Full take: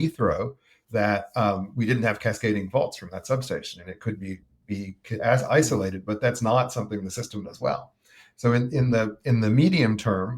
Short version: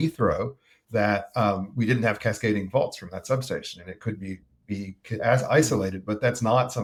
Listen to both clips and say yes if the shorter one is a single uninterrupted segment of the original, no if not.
yes